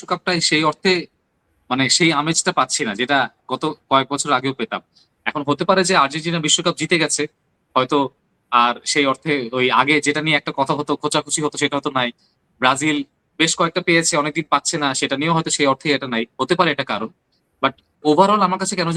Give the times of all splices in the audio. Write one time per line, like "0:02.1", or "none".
none